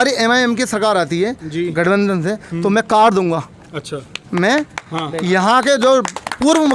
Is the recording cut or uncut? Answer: uncut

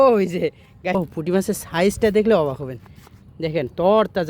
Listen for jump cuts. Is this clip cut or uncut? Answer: cut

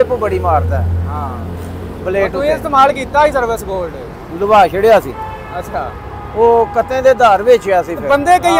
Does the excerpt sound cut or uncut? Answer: uncut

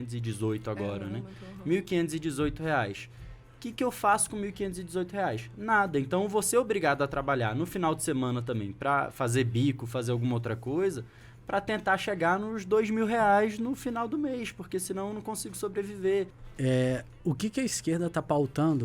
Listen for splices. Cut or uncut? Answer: cut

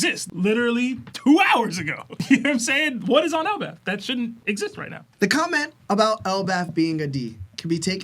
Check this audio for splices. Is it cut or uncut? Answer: cut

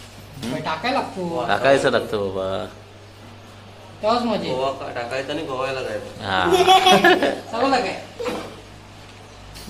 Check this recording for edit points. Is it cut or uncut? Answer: uncut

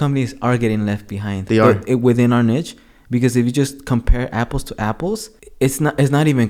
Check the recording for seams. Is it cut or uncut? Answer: uncut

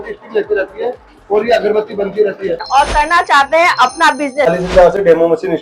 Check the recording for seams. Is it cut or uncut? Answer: cut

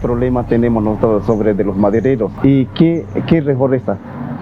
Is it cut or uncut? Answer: cut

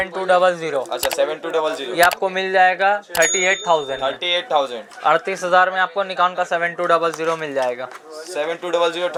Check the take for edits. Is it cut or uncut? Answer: uncut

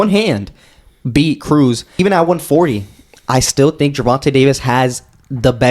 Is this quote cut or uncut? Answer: cut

